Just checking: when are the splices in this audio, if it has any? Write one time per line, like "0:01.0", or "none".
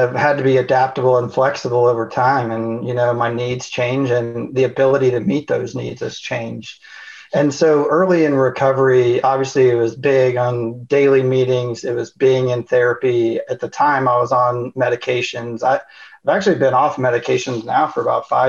none